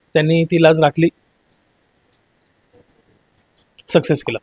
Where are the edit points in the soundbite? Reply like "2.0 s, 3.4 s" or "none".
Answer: none